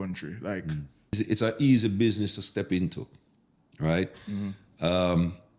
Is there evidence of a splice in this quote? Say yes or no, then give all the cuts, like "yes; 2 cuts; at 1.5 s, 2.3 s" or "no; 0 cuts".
yes; 1 cut; at 1.2 s